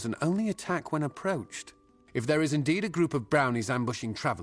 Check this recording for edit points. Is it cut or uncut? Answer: uncut